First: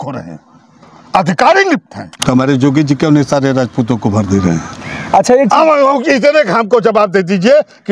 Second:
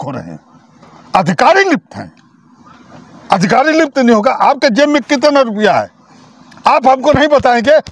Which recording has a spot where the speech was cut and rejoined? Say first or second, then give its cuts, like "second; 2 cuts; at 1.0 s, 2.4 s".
first; 1 cut; at 2.1 s